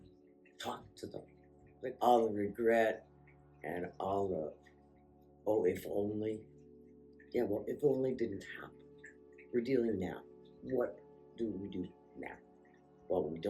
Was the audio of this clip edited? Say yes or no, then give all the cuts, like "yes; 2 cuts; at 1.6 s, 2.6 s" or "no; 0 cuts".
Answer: yes; 1 cut; at 1.6 s